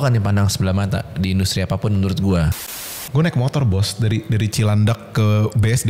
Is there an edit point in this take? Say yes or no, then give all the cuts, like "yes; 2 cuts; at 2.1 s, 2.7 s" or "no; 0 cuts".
yes; 1 cut; at 2.5 s